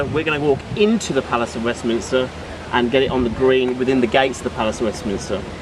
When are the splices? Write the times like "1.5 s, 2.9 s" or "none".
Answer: 2.0 s